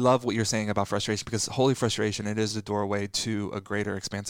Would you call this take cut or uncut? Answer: uncut